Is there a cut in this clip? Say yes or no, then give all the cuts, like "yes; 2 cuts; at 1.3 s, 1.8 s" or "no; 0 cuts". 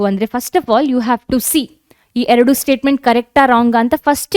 no; 0 cuts